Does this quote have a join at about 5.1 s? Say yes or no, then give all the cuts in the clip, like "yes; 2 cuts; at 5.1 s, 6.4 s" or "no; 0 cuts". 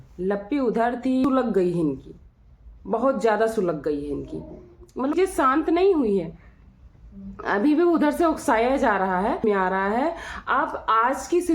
yes; 3 cuts; at 1.3 s, 5.1 s, 9.4 s